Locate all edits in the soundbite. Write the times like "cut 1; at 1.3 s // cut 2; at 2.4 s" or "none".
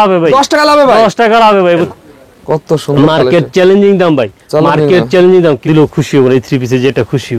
cut 1; at 1.9 s // cut 2; at 5.6 s

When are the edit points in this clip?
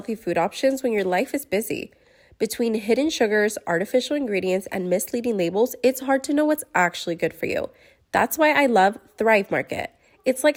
none

